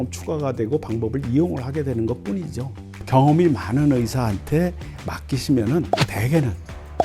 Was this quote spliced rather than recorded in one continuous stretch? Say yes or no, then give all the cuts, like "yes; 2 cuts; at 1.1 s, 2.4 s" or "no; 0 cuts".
yes; 1 cut; at 5.9 s